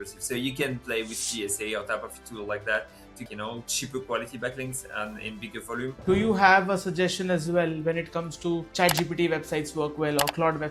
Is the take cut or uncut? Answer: cut